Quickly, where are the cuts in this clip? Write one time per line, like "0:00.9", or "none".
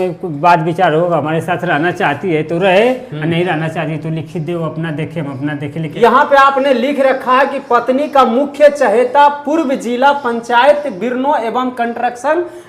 0:05.8